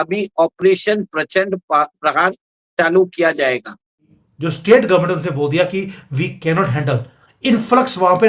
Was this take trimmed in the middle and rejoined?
yes; 1 cut; at 4.1 s

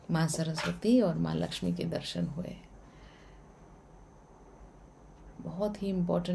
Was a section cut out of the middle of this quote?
no; 0 cuts

